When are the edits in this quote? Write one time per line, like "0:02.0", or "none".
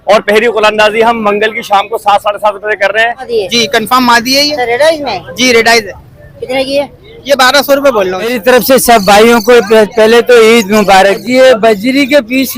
0:03.3
0:08.4
0:11.2